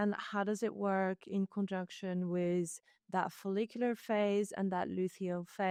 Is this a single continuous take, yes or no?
yes